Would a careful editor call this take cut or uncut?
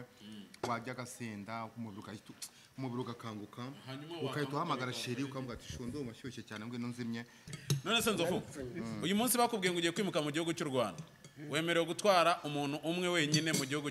cut